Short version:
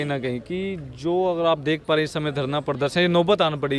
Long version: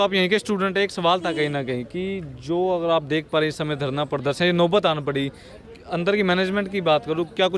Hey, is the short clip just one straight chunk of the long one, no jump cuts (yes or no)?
yes